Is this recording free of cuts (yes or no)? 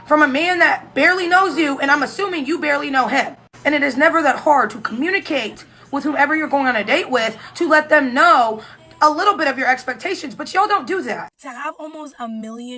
no